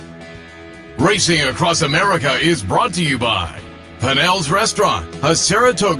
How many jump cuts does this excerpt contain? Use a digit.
1